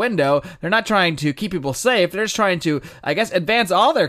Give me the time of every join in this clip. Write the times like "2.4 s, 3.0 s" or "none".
none